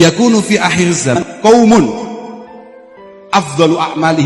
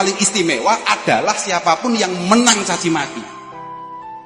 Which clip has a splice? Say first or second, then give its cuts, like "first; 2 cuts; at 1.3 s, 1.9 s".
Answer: first; 1 cut; at 1.2 s